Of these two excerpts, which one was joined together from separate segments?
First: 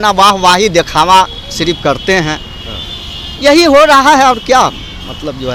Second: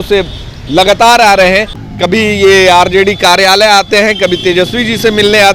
second; 1 cut; at 1.8 s

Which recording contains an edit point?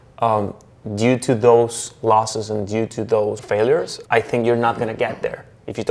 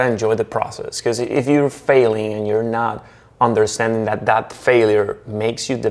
first; 1 cut; at 3.6 s

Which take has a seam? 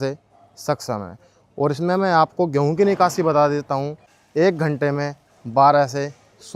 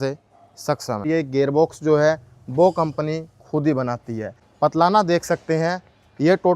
second; 2 cuts; at 1.1 s, 4.4 s

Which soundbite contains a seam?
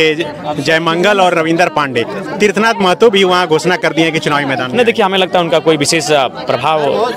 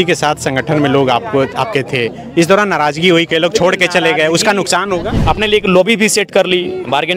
second; 1 cut; at 5.1 s

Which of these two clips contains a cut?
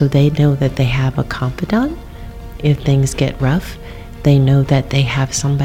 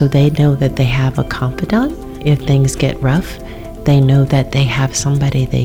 second; 1 cut; at 2.1 s

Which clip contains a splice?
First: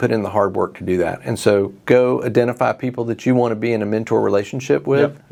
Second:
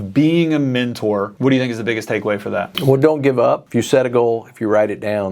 second; 3 cuts; at 1.3 s, 2.7 s, 3.6 s

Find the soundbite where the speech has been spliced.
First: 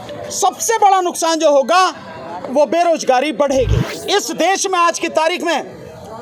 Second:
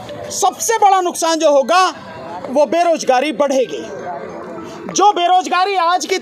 first; 1 cut; at 3.9 s

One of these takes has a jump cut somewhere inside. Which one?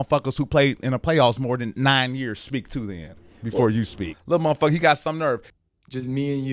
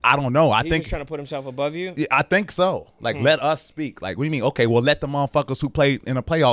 first; 1 cut; at 5.5 s

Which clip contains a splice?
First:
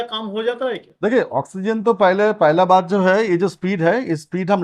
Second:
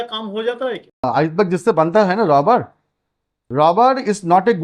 second; 1 cut; at 1.0 s

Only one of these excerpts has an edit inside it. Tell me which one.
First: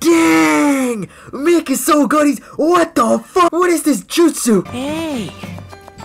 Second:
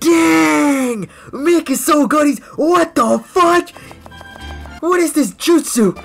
first; 2 cuts; at 3.5 s, 4.7 s

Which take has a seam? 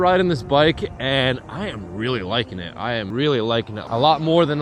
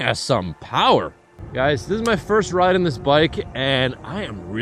first; 2 cuts; at 3.1 s, 3.8 s

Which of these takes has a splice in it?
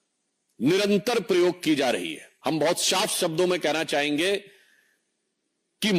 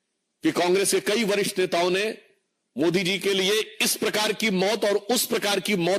first; 1 cut; at 2.2 s

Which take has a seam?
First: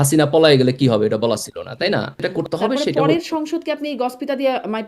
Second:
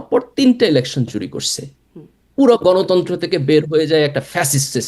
first; 1 cut; at 2.2 s

